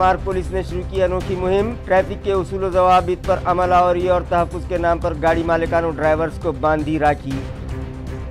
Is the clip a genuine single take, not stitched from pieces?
yes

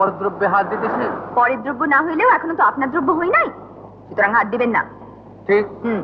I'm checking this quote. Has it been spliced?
no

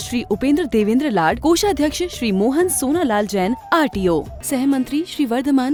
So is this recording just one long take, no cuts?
yes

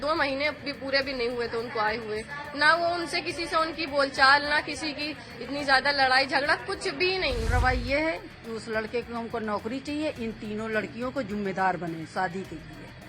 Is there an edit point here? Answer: yes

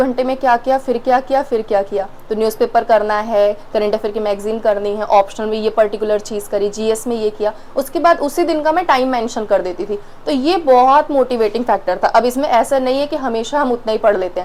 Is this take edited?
no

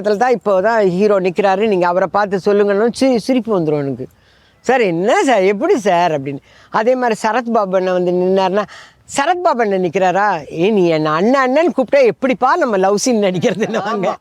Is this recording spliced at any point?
no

